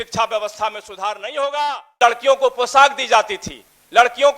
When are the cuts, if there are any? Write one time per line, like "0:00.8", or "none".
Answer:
0:02.0